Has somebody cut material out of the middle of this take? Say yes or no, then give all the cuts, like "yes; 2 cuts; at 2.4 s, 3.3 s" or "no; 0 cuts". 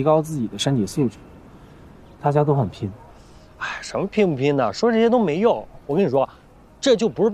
no; 0 cuts